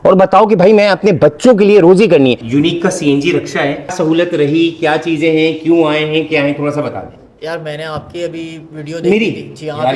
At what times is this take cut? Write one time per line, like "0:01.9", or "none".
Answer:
0:02.4
0:03.9